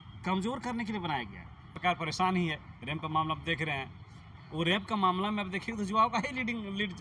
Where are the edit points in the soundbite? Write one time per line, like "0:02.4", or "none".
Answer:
0:01.8